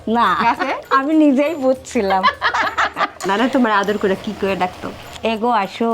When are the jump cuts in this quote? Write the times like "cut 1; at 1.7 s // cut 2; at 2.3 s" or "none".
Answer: cut 1; at 0.8 s // cut 2; at 3.2 s